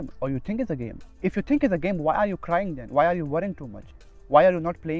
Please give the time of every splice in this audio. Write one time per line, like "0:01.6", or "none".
0:01.1